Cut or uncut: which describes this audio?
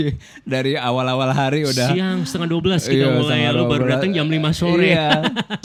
uncut